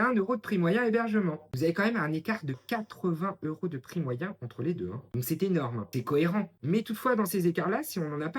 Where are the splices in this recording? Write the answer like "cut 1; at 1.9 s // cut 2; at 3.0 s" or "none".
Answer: cut 1; at 1.5 s // cut 2; at 5.1 s // cut 3; at 5.9 s